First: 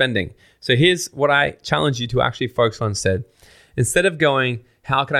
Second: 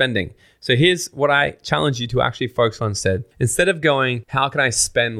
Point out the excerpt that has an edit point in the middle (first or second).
second